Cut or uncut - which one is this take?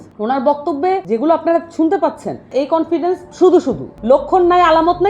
cut